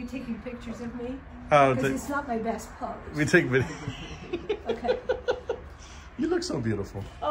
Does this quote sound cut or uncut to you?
uncut